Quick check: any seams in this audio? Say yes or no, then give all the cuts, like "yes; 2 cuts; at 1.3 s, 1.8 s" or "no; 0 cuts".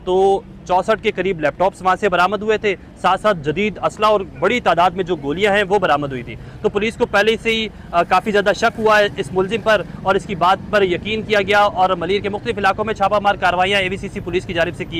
no; 0 cuts